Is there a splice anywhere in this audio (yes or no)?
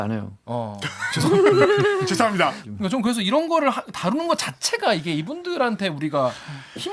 no